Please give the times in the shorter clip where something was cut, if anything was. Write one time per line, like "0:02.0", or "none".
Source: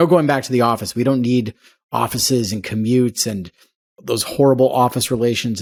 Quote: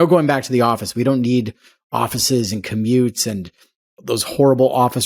none